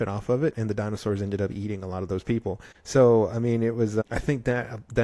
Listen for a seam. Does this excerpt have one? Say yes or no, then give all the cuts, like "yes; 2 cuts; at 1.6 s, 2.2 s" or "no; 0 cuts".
yes; 2 cuts; at 2.7 s, 4.0 s